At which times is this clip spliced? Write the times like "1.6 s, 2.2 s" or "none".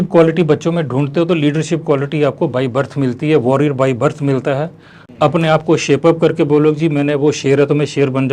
none